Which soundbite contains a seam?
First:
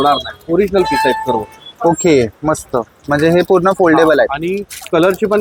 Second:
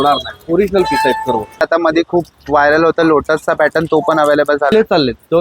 second; 2 cuts; at 1.6 s, 4.7 s

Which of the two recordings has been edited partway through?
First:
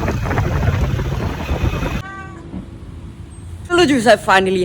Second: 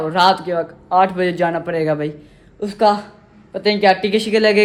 first; 2 cuts; at 2.0 s, 3.7 s

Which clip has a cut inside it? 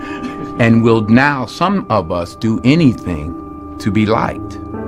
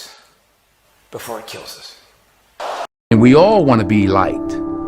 second; 1 cut; at 3.1 s

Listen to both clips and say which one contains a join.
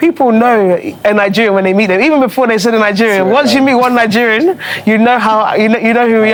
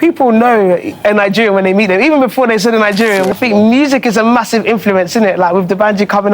second; 1 cut; at 3.3 s

